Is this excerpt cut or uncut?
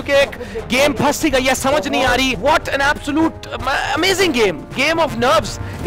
cut